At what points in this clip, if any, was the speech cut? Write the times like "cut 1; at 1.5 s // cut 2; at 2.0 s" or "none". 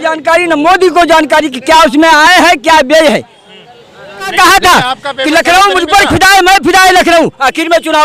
cut 1; at 4.3 s